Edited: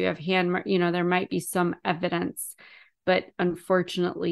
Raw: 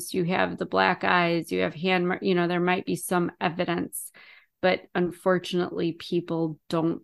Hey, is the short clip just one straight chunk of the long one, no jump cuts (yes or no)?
yes